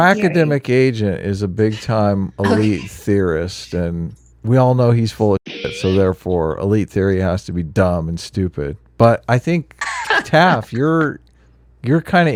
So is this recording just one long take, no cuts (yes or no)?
yes